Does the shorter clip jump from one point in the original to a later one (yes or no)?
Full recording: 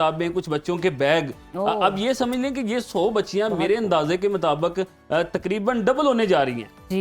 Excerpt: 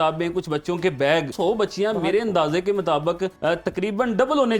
yes